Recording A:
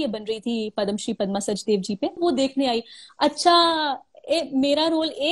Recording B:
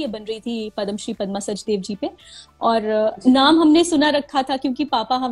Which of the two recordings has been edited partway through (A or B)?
A